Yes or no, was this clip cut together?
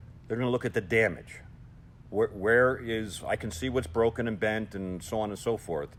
no